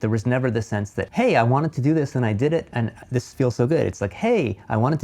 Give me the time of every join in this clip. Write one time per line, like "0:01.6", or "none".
0:01.0
0:02.7